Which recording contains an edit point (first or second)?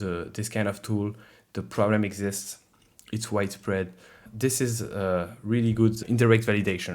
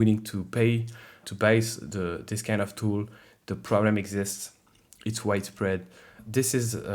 first